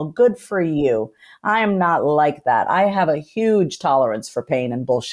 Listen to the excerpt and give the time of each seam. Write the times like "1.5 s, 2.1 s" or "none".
none